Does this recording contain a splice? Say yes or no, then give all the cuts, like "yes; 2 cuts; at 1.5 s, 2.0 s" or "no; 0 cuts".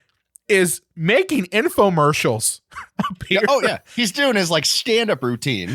no; 0 cuts